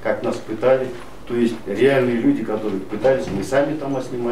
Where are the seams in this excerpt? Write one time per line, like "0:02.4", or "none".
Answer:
none